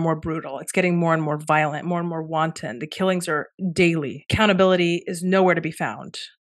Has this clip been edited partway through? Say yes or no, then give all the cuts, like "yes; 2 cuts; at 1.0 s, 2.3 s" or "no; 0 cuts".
no; 0 cuts